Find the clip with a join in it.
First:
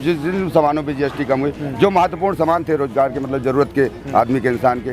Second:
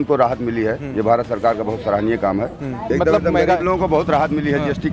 second; 1 cut; at 2.9 s

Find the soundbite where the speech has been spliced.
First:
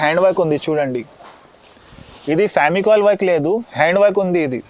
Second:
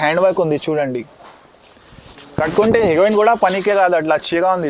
second; 1 cut; at 2.1 s

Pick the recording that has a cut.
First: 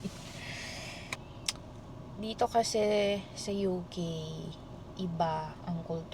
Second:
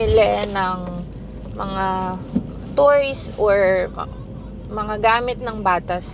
first; 1 cut; at 1.2 s

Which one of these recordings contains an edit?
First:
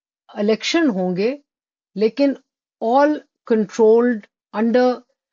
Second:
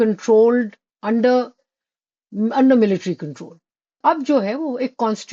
second; 1 cut; at 4.0 s

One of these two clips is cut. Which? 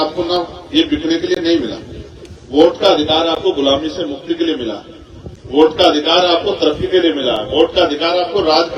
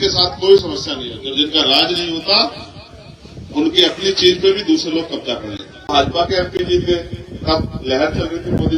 second; 1 cut; at 5.9 s

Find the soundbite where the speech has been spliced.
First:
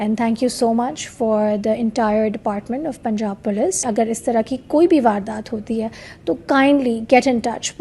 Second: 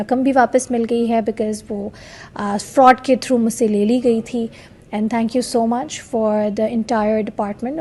first; 1 cut; at 3.8 s

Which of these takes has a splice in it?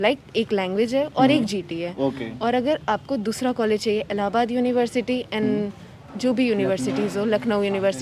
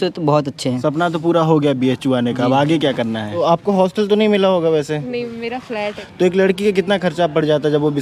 second; 2 cuts; at 3.4 s, 6.0 s

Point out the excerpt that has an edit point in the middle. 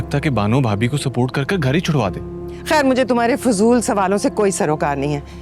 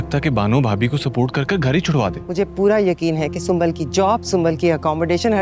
second; 1 cut; at 2.2 s

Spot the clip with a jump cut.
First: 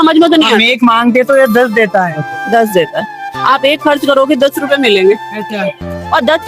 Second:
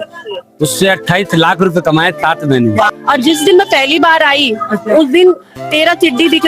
second; 1 cut; at 2.9 s

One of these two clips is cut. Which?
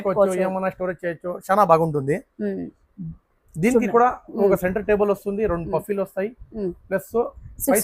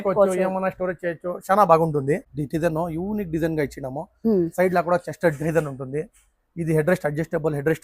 second; 1 cut; at 2.3 s

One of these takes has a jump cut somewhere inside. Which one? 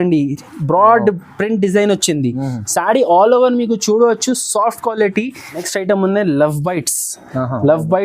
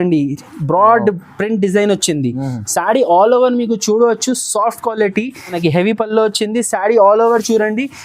second; 1 cut; at 5.6 s

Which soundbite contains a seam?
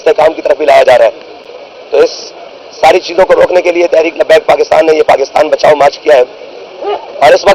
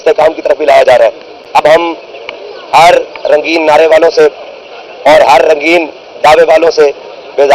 second; 1 cut; at 1.3 s

